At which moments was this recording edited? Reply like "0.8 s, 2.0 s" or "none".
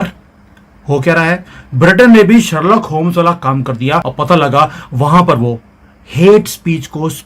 4.1 s